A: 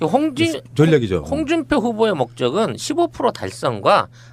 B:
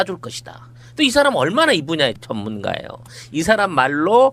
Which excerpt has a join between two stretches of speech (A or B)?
B